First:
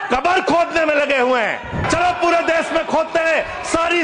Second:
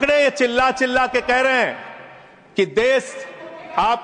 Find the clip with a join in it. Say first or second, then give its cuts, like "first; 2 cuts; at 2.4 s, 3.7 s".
first; 1 cut; at 1.8 s